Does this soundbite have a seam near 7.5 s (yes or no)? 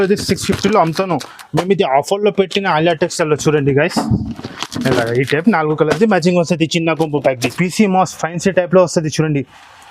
yes